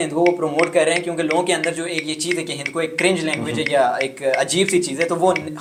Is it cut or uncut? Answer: uncut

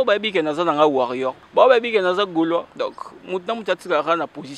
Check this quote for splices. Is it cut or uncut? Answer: cut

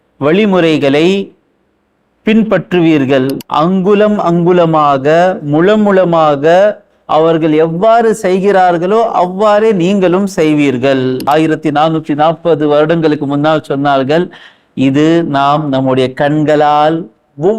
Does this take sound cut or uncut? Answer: cut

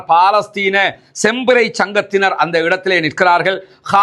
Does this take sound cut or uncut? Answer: uncut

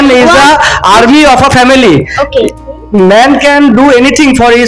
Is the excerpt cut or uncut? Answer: uncut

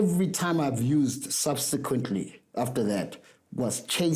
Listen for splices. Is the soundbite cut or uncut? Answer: uncut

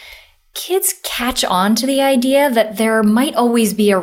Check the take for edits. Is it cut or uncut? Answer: uncut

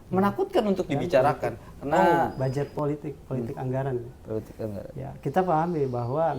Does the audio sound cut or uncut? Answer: cut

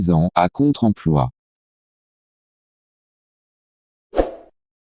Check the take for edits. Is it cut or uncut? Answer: uncut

